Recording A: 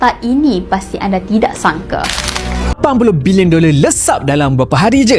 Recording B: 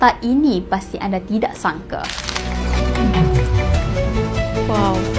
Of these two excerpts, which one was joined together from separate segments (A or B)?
A